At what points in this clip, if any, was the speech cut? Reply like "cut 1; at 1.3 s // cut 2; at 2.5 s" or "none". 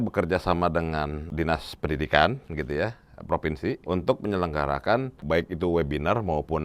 cut 1; at 1.2 s // cut 2; at 3.8 s // cut 3; at 5.2 s